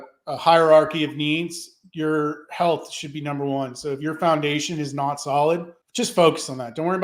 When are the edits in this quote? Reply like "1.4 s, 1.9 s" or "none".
5.8 s